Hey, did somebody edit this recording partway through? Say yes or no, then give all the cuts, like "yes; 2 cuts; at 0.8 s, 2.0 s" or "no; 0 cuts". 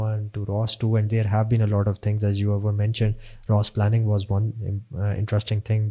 no; 0 cuts